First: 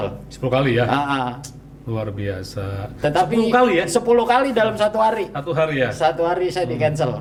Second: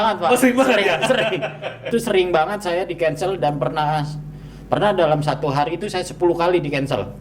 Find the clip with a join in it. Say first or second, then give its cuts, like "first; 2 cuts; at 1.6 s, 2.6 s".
second; 1 cut; at 1.9 s